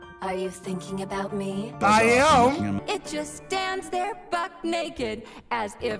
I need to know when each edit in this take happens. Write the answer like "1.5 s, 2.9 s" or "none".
2.8 s